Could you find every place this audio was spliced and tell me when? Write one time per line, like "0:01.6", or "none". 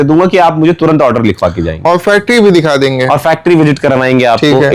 none

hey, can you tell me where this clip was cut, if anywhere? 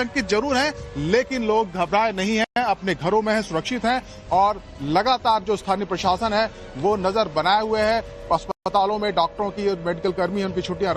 none

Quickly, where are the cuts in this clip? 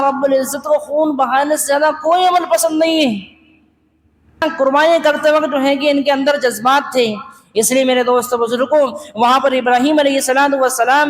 0:04.4

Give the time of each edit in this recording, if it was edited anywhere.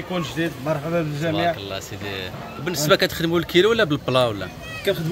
none

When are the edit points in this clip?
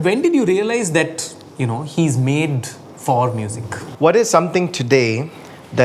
0:03.9

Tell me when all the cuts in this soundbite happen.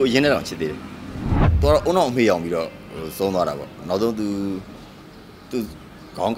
0:01.6

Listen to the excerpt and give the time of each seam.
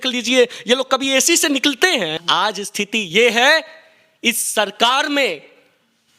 0:02.2

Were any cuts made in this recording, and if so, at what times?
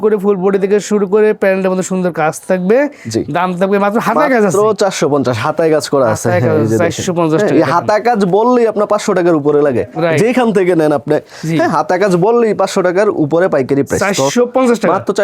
none

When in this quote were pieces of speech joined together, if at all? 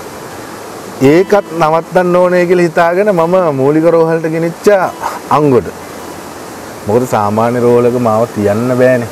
none

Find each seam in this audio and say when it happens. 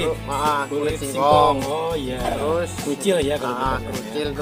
none

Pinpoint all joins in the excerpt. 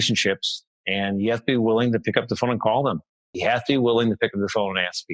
0:03.3

